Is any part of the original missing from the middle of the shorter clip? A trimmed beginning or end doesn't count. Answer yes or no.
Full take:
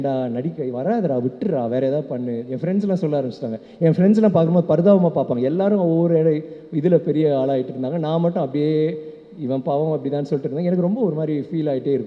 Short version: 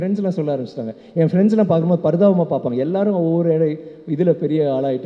no